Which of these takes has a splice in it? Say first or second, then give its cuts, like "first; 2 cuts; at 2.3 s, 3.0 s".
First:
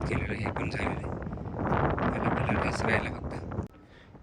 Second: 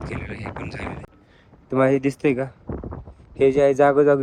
second; 1 cut; at 1.1 s